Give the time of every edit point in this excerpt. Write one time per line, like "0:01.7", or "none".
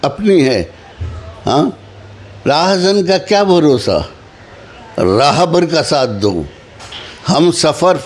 0:00.9